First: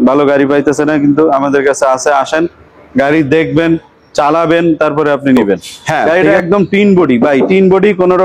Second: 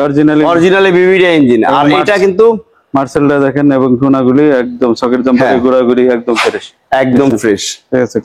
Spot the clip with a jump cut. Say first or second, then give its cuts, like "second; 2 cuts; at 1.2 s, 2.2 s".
first; 1 cut; at 6.1 s